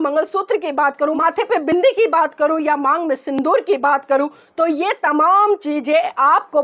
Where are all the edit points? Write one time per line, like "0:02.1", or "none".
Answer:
0:01.2

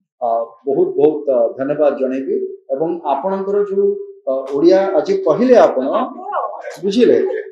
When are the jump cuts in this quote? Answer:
none

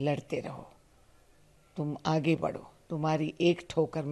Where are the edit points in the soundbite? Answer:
none

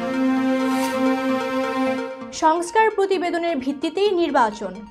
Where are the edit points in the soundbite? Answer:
0:02.2

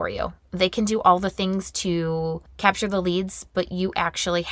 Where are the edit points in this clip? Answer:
0:02.5

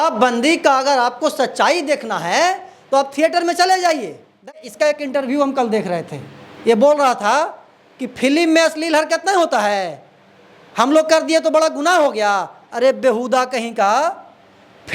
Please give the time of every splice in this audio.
0:04.6

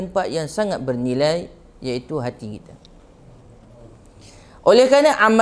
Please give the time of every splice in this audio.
none

